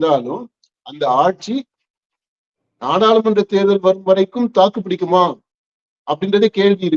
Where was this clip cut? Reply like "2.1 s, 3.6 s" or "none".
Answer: none